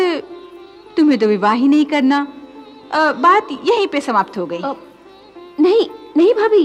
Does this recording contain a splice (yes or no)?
no